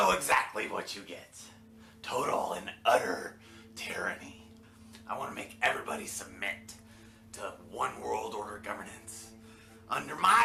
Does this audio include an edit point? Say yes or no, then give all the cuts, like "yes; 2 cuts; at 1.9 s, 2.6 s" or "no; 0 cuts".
no; 0 cuts